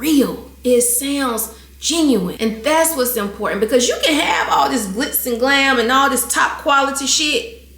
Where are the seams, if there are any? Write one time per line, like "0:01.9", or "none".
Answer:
0:02.3